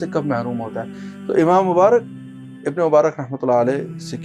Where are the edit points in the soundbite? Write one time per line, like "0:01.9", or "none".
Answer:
0:01.0

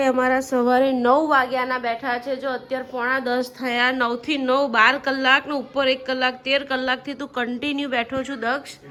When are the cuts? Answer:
none

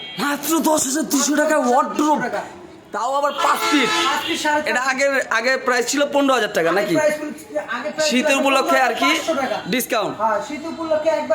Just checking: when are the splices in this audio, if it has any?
none

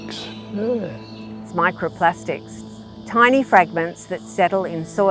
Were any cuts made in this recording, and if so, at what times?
none

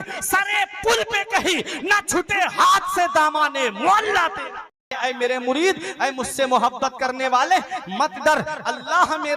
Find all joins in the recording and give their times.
0:04.9

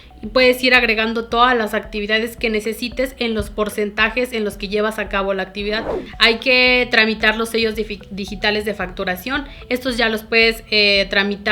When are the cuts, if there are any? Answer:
0:06.0

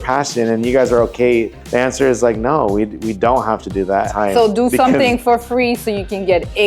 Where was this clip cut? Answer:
0:01.6
0:04.1

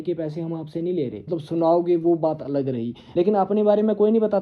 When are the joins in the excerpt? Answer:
0:01.3
0:03.0

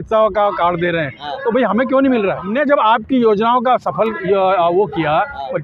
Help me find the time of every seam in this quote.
0:02.4

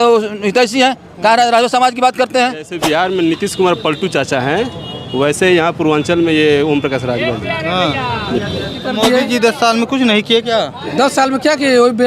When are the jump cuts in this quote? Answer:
0:02.7
0:08.8

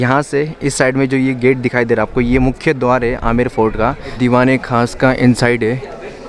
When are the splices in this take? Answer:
0:04.2

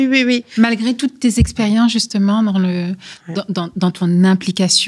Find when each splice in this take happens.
none

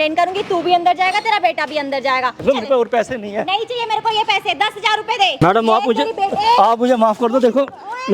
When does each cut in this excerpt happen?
0:02.4
0:05.4

